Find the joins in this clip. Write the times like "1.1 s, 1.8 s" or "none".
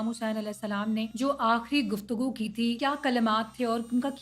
1.1 s, 2.8 s